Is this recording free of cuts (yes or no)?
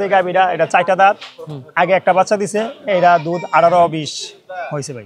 yes